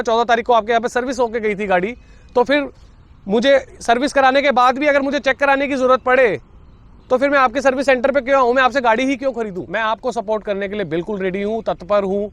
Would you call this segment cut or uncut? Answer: cut